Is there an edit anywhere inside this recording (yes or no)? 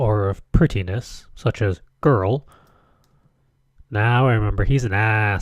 yes